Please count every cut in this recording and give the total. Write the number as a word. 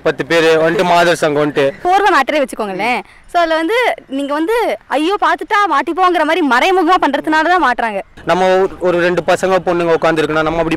two